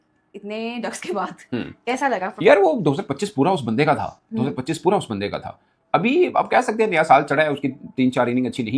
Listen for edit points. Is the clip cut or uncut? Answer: uncut